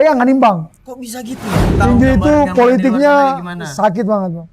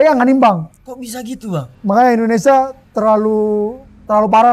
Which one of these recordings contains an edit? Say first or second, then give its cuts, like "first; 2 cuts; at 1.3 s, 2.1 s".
first; 1 cut; at 1.7 s